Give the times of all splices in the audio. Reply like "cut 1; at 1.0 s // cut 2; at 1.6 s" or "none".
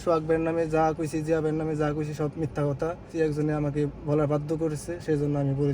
cut 1; at 3.1 s